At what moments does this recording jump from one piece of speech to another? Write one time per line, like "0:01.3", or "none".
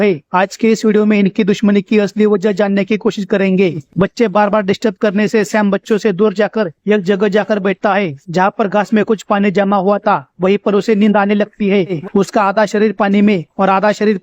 0:03.8
0:12.0